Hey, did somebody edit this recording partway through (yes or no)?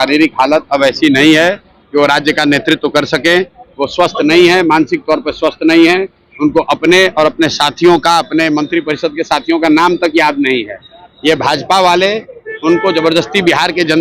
no